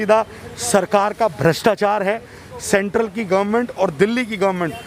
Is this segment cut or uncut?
uncut